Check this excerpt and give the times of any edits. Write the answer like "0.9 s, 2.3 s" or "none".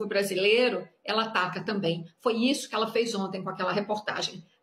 none